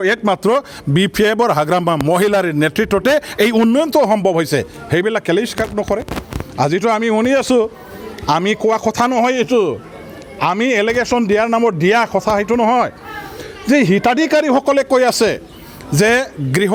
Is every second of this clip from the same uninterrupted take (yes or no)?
yes